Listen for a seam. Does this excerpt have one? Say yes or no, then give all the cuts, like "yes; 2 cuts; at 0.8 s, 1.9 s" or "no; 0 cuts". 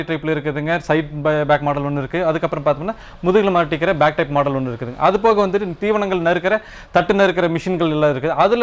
no; 0 cuts